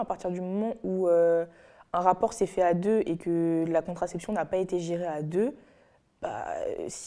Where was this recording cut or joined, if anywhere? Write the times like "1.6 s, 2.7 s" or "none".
none